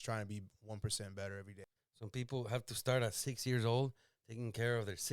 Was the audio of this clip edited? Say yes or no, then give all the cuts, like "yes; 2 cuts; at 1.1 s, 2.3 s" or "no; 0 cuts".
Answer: yes; 1 cut; at 1.5 s